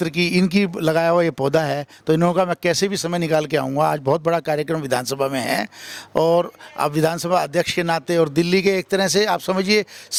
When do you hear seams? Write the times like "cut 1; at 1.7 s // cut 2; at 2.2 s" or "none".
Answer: none